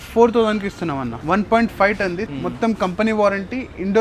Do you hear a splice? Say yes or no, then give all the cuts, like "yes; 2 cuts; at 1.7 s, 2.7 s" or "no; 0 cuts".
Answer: yes; 2 cuts; at 1.1 s, 2.3 s